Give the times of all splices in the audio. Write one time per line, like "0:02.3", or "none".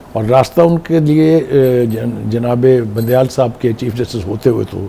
none